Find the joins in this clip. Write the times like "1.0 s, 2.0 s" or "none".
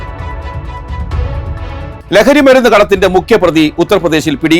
2.0 s